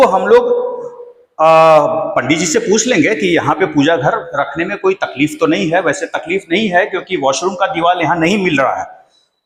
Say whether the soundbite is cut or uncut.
uncut